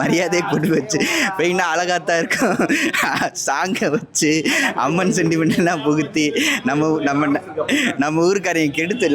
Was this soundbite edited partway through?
no; 0 cuts

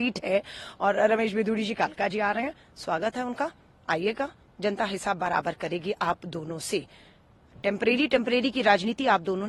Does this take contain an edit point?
no; 0 cuts

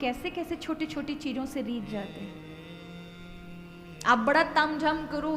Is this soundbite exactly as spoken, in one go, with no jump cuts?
yes; 0 cuts

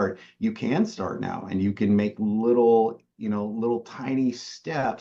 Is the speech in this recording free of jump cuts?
yes; 0 cuts

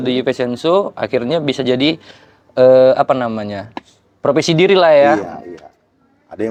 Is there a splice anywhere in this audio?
no; 0 cuts

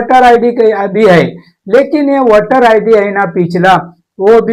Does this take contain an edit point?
no; 0 cuts

